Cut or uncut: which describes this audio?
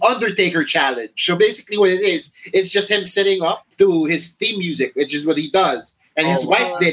cut